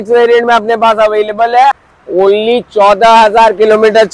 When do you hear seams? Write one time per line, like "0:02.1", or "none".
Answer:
0:01.9